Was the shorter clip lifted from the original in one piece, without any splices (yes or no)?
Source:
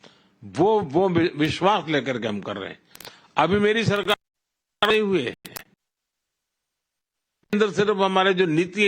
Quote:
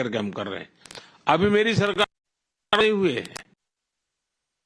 no